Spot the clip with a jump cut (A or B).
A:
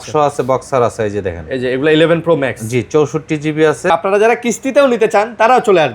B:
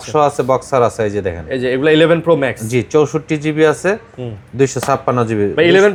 A